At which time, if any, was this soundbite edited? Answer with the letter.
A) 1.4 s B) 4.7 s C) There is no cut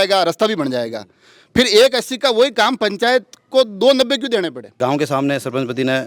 B